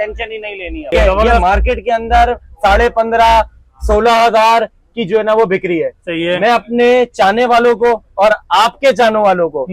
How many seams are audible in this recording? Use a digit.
1